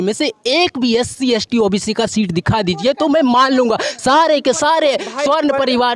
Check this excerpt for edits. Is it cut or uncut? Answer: uncut